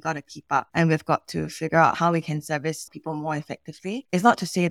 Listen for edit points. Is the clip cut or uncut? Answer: cut